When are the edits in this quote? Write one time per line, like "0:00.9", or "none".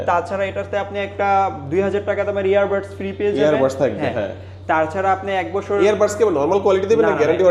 none